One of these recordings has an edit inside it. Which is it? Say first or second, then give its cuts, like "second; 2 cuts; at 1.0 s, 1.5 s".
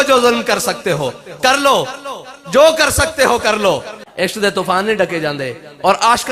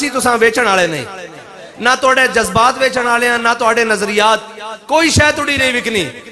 first; 1 cut; at 4.0 s